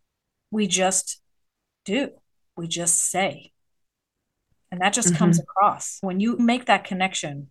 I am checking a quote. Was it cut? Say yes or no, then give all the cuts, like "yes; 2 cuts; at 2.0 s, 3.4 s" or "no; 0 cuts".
no; 0 cuts